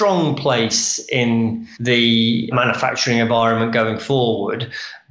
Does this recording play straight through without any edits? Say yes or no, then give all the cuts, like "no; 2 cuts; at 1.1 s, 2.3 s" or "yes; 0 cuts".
no; 2 cuts; at 1.7 s, 2.5 s